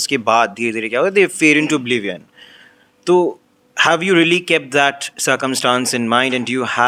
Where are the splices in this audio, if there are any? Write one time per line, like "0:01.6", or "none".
none